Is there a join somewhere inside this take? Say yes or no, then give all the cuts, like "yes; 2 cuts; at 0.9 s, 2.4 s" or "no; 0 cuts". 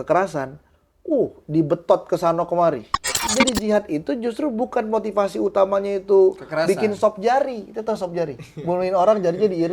yes; 1 cut; at 3.3 s